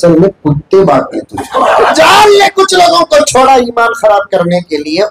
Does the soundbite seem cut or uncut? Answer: cut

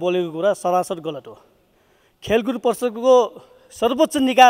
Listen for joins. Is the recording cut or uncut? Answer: uncut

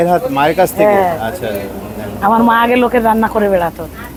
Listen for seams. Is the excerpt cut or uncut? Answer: uncut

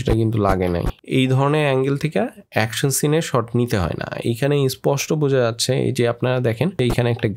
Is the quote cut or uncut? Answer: uncut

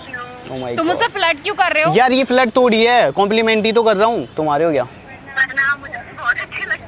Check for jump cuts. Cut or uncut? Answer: cut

